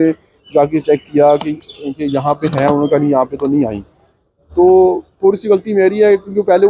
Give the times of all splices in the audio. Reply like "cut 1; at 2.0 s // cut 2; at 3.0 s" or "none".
none